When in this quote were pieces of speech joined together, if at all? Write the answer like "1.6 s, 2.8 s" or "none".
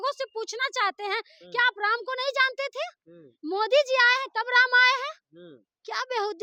none